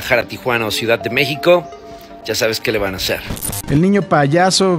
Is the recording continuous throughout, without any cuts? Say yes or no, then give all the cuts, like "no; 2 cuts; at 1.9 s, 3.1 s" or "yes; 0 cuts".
no; 1 cut; at 3.2 s